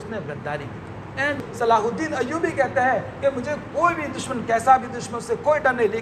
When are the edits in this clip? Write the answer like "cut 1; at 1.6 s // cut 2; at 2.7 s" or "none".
cut 1; at 1.4 s